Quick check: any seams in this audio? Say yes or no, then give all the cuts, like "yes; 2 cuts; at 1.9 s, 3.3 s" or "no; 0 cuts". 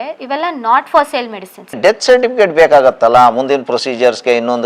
yes; 1 cut; at 1.7 s